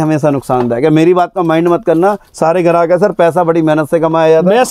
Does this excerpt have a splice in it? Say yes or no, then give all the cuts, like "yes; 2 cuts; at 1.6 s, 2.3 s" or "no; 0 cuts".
no; 0 cuts